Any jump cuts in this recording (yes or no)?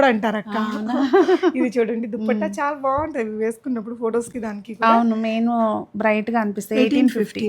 no